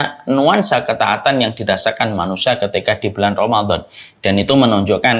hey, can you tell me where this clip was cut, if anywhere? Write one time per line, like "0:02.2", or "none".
none